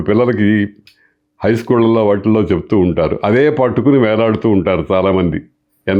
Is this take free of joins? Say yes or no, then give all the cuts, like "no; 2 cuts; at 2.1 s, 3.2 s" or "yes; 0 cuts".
yes; 0 cuts